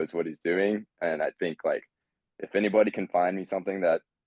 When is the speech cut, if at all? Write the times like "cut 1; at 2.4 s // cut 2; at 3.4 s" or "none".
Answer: none